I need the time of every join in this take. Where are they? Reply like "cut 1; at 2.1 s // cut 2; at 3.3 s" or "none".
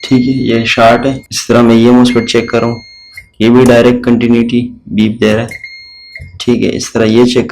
cut 1; at 1.3 s